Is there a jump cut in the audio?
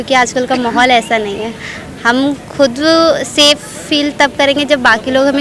no; 0 cuts

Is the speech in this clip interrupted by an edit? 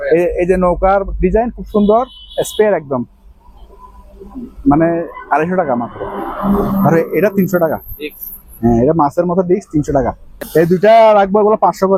no; 0 cuts

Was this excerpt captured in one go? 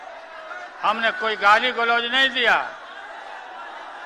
yes; 0 cuts

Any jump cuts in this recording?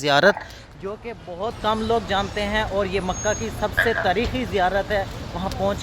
no; 0 cuts

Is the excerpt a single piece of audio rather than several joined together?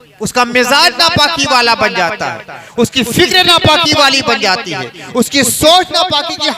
yes; 0 cuts

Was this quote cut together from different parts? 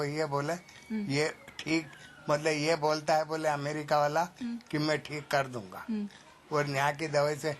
no; 0 cuts

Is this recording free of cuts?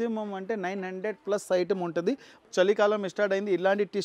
no; 1 cut; at 2.5 s

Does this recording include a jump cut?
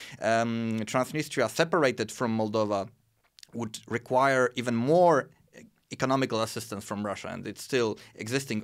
no; 0 cuts

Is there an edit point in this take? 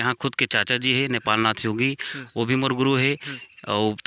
no; 0 cuts

